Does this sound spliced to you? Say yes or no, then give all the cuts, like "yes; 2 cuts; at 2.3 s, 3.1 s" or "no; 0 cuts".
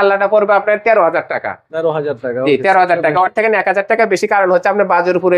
no; 0 cuts